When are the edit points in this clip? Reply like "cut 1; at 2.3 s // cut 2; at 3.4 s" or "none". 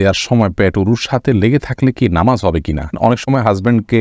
cut 1; at 3.0 s